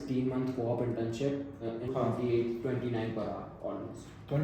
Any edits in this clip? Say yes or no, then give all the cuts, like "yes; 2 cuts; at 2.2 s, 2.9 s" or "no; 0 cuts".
yes; 1 cut; at 1.8 s